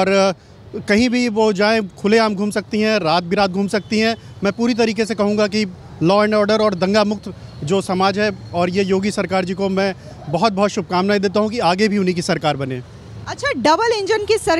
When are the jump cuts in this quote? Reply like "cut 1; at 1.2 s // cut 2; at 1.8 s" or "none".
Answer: none